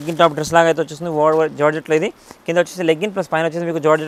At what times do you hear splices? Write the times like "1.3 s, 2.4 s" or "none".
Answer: none